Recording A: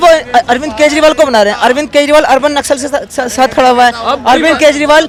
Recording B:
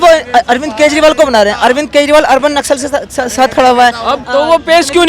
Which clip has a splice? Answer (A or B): B